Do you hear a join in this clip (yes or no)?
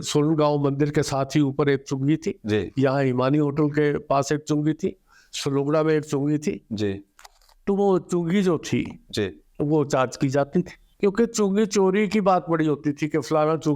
yes